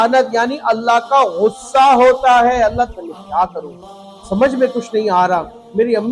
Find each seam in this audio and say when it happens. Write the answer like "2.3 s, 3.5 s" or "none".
2.9 s